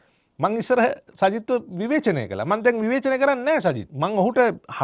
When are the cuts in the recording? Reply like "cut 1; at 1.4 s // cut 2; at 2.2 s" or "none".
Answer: cut 1; at 3.9 s